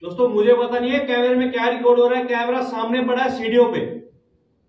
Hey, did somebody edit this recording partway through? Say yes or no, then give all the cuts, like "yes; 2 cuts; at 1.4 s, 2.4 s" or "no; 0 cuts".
no; 0 cuts